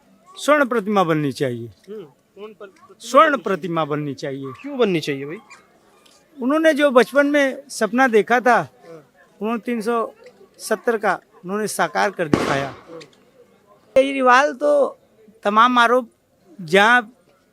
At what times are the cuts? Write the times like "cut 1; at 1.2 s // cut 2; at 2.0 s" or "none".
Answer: cut 1; at 13.9 s